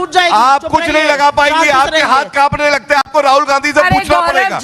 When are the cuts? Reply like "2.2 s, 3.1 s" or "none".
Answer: none